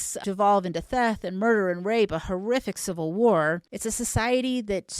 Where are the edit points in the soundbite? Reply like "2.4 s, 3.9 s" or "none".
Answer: 3.7 s